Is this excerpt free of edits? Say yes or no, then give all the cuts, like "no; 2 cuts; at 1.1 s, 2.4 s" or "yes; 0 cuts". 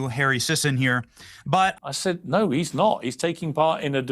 no; 1 cut; at 1.7 s